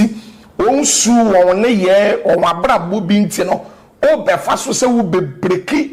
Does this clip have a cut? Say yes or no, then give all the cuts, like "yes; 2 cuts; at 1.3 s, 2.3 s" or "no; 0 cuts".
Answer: no; 0 cuts